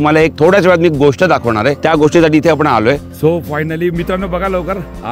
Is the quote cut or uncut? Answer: cut